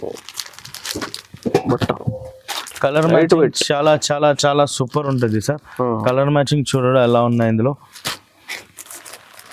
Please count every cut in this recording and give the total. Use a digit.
0